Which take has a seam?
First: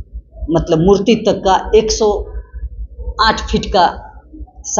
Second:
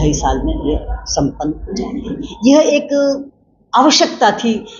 second; 1 cut; at 2.2 s

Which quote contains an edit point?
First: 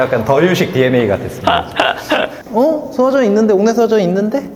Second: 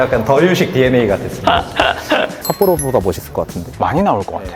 second; 1 cut; at 2.4 s

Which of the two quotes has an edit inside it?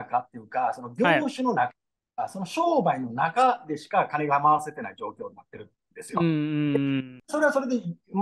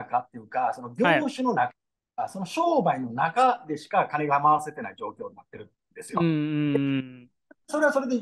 first; 1 cut; at 7.2 s

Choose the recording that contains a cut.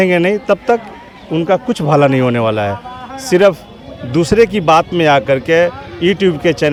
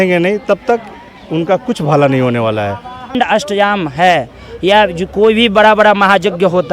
second; 1 cut; at 3.1 s

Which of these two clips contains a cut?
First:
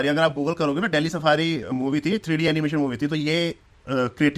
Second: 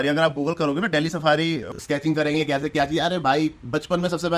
second; 1 cut; at 1.7 s

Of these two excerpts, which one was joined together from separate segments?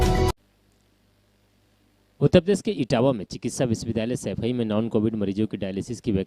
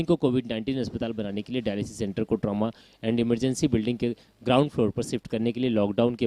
second; 2 cuts; at 4.3 s, 4.9 s

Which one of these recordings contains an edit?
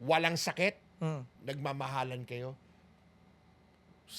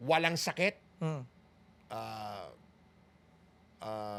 first; 1 cut; at 1.3 s

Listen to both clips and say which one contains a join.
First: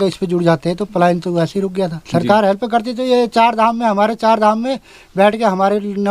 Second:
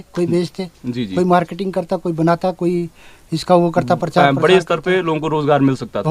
first; 1 cut; at 2.0 s

